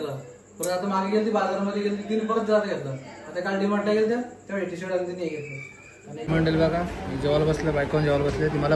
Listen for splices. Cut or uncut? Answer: cut